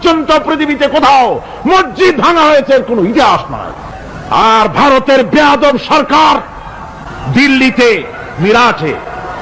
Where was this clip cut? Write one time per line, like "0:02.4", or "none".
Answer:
0:07.2